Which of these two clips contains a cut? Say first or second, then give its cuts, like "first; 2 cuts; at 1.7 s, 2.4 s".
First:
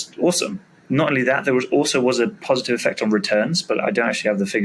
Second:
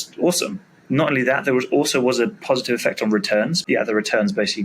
second; 1 cut; at 3.6 s